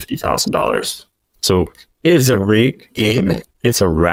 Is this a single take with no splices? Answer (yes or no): yes